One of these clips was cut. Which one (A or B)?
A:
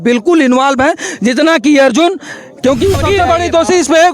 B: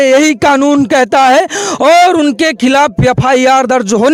A